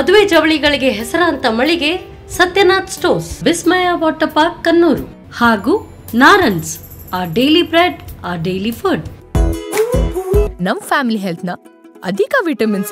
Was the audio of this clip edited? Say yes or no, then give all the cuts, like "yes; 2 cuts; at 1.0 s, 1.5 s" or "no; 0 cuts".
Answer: yes; 1 cut; at 9.2 s